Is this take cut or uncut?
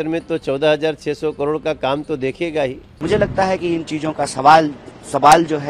cut